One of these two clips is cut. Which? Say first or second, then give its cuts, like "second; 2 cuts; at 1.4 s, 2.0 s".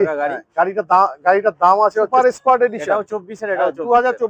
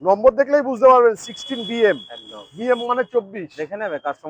first; 1 cut; at 2.1 s